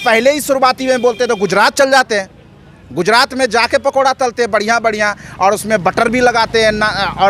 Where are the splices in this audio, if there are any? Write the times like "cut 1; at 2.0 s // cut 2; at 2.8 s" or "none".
none